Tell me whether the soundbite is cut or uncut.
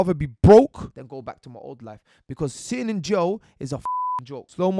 cut